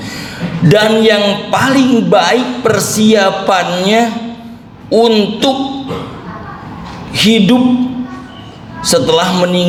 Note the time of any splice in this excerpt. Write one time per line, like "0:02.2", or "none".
none